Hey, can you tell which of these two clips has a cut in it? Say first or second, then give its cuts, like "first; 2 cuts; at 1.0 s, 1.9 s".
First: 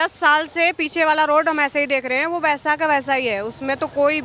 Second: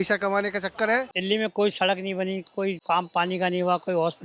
second; 2 cuts; at 1.1 s, 2.8 s